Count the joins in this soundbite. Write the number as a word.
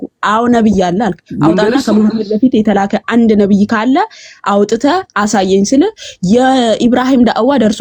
zero